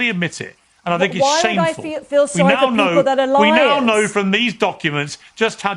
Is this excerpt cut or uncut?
uncut